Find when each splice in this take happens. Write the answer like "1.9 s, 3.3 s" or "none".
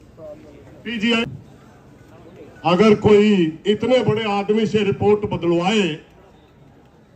1.2 s